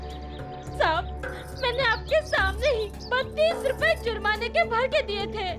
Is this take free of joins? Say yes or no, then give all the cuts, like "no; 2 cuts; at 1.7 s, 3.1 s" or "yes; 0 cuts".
yes; 0 cuts